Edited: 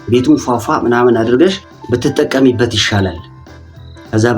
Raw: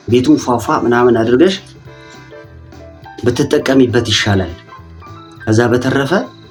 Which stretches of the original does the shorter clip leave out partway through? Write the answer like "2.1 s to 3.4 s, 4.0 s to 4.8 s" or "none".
1.7 s to 3.0 s